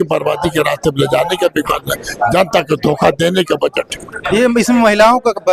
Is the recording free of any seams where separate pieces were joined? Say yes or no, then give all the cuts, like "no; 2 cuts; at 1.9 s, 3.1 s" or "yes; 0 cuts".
yes; 0 cuts